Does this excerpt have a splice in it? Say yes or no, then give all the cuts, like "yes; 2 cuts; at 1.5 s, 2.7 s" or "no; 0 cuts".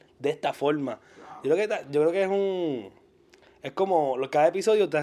no; 0 cuts